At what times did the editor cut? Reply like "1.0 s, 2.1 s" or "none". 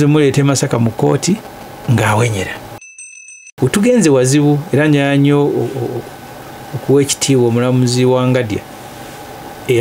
2.8 s